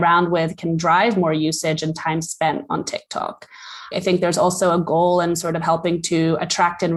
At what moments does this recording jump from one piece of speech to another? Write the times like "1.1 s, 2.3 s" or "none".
none